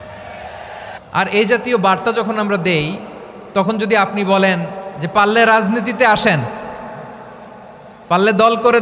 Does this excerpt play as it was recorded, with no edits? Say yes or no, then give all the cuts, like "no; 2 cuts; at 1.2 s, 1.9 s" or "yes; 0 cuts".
no; 1 cut; at 0.9 s